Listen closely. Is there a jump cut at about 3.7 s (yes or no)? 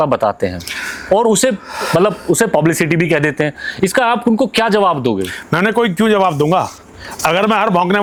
no